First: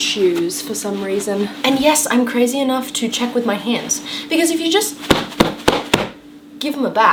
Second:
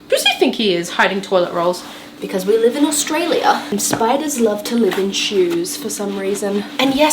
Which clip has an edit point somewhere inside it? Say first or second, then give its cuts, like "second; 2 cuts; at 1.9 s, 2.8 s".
second; 2 cuts; at 2.1 s, 3.7 s